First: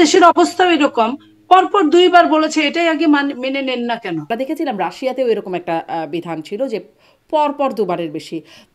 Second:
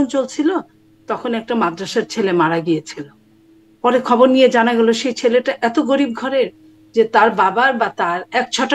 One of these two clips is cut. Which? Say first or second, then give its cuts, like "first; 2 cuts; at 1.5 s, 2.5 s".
first; 1 cut; at 4.3 s